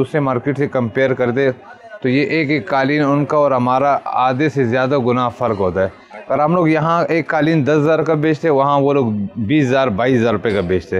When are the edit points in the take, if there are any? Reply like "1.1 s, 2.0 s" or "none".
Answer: none